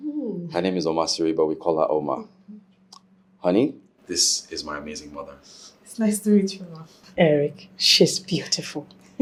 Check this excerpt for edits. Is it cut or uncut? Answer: uncut